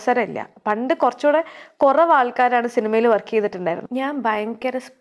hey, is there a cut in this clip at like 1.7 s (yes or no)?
no